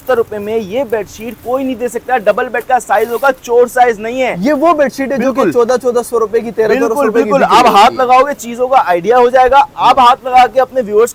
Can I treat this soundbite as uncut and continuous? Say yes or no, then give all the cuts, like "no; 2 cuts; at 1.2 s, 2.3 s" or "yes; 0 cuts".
yes; 0 cuts